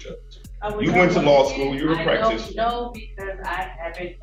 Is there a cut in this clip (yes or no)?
no